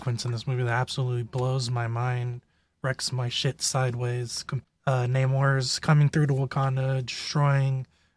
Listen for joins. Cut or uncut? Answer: cut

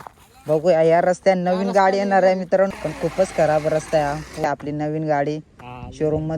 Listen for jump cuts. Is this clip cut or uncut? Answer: cut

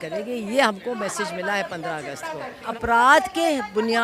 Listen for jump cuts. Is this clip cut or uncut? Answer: cut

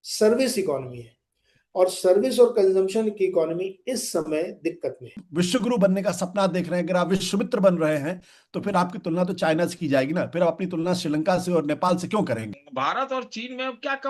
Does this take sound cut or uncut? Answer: cut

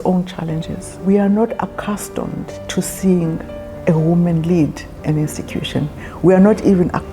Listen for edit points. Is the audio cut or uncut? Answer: cut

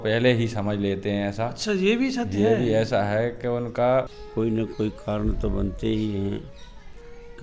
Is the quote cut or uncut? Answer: cut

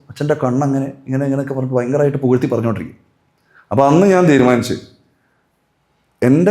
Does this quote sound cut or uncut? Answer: uncut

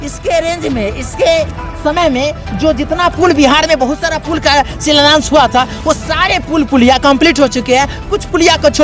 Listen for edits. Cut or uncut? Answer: uncut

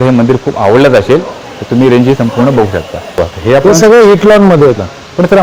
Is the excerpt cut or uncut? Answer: uncut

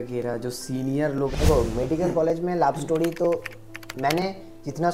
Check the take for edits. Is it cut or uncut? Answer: cut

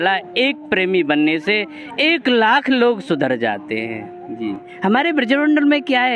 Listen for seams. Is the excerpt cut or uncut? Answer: cut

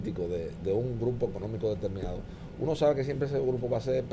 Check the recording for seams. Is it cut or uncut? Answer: uncut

